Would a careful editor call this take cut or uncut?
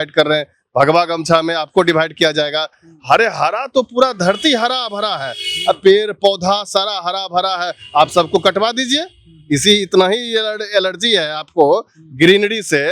uncut